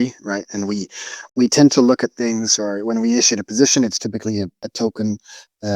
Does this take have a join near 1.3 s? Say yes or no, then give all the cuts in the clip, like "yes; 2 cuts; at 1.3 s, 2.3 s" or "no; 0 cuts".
yes; 2 cuts; at 1.3 s, 4.6 s